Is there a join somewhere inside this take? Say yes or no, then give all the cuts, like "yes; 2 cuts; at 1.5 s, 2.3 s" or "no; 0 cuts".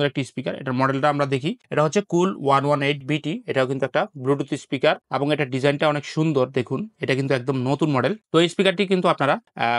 no; 0 cuts